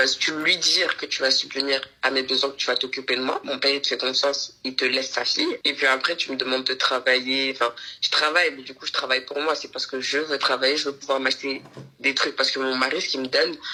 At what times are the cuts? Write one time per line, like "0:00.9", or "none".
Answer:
none

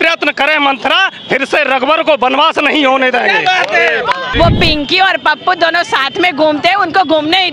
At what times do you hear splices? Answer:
0:04.3

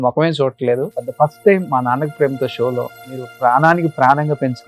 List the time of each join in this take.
0:01.0
0:03.3

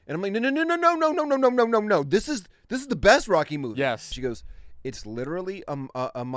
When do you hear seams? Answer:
0:04.1

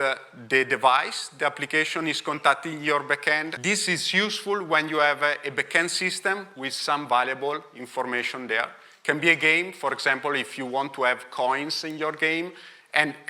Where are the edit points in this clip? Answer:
0:03.5

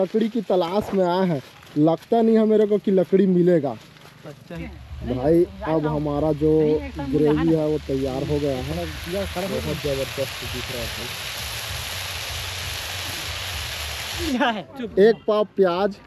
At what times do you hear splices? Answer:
0:05.1
0:14.3

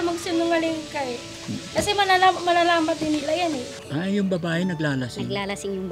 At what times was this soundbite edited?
0:03.7

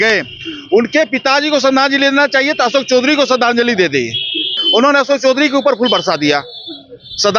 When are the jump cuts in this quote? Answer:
0:04.6

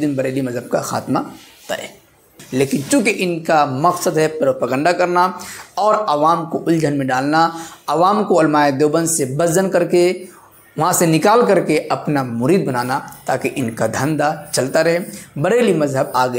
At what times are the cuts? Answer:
0:02.4

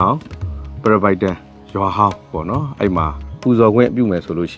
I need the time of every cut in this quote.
0:01.5
0:03.3

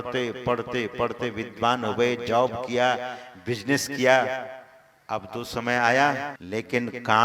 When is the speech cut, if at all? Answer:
0:06.4

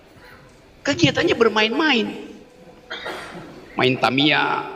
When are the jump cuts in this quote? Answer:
none

